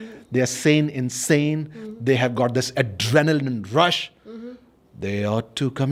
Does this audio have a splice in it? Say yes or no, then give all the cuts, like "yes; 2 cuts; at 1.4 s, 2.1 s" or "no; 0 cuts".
no; 0 cuts